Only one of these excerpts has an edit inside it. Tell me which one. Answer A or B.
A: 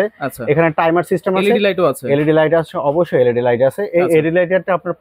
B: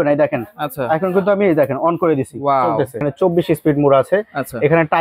B